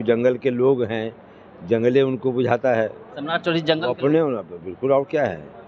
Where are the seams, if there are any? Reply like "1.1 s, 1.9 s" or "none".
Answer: 3.1 s